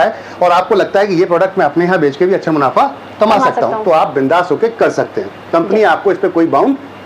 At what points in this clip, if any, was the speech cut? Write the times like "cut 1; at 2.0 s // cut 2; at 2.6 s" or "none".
none